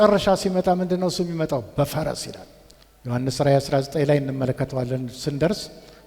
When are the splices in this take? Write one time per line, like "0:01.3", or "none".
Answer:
none